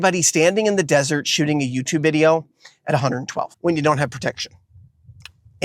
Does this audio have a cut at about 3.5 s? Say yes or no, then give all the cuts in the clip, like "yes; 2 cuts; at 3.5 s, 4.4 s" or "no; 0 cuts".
yes; 1 cut; at 3.5 s